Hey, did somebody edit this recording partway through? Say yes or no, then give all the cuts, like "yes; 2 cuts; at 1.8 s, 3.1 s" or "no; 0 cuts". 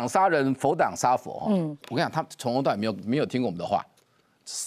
yes; 1 cut; at 1.8 s